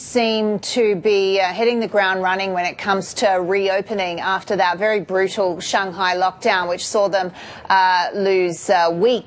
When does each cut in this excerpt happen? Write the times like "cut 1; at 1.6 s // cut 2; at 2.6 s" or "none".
none